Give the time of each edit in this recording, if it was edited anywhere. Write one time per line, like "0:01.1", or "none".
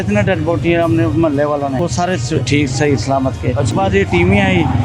0:01.8
0:03.7